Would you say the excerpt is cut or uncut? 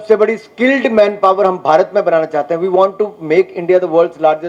uncut